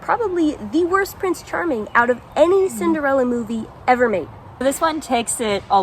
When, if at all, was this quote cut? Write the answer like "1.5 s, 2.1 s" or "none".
4.6 s